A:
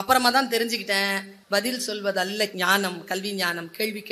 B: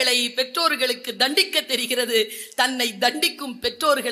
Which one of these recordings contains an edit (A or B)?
A